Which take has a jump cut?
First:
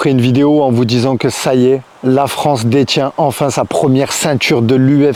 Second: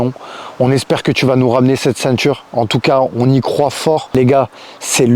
second; 1 cut; at 4.1 s

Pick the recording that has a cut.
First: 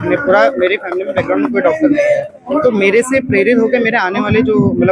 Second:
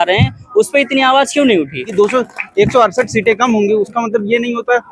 second; 1 cut; at 1.9 s

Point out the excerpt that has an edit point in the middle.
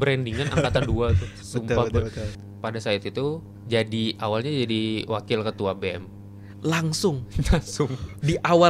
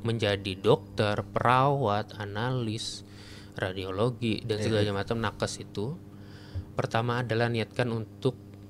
first; 2 cuts; at 2.4 s, 3.5 s

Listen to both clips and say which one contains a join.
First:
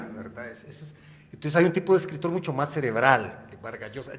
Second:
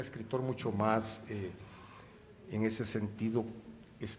second; 1 cut; at 1.2 s

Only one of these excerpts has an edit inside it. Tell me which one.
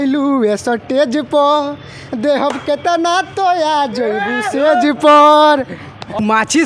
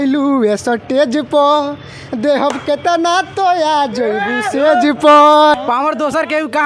second; 1 cut; at 5.5 s

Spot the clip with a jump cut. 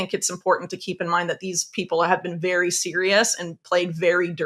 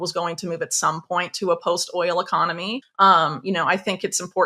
second; 1 cut; at 2.8 s

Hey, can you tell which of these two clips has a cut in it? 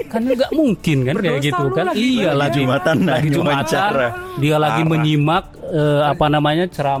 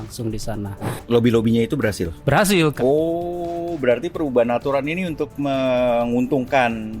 second; 2 cuts; at 1.0 s, 2.7 s

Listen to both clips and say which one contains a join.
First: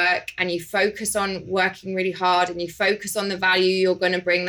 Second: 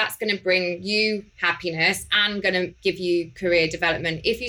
second; 2 cuts; at 1.3 s, 2.7 s

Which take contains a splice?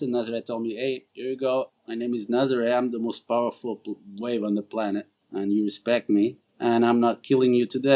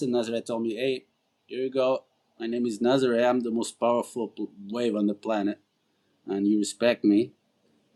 first; 4 cuts; at 1.1 s, 1.8 s, 5.2 s, 6.5 s

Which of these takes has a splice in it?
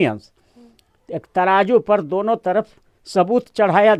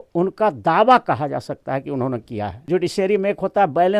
second; 1 cut; at 2.6 s

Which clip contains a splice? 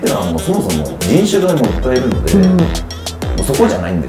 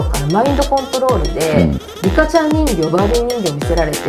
second; 1 cut; at 1.9 s

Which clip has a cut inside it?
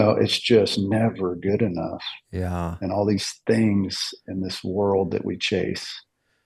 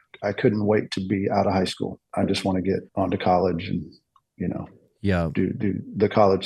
second; 2 cuts; at 2.1 s, 2.9 s

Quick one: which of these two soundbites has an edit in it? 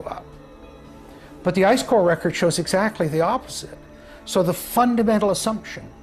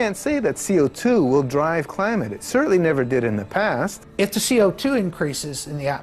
second; 1 cut; at 4.0 s

